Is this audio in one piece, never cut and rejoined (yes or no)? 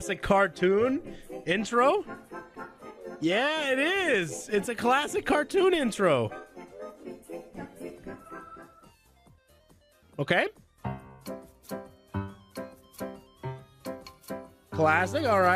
yes